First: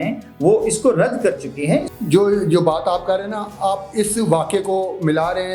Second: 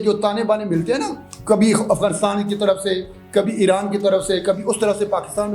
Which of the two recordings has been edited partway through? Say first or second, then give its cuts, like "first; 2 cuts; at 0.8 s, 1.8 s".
first; 1 cut; at 1.9 s